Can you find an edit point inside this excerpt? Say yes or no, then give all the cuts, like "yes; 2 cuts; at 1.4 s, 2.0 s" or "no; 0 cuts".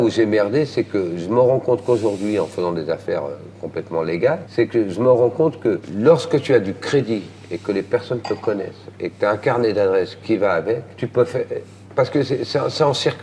yes; 3 cuts; at 4.5 s, 5.9 s, 11.0 s